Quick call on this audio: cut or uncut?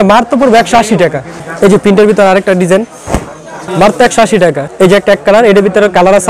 cut